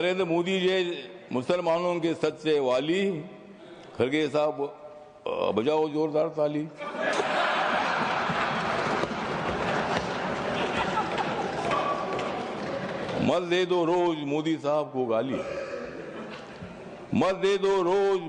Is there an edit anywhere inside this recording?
no; 0 cuts

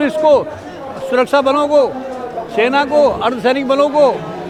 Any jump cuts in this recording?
no; 0 cuts

